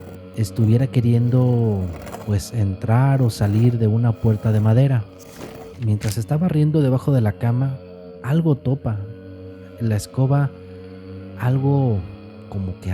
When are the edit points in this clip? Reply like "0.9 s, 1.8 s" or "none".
5.8 s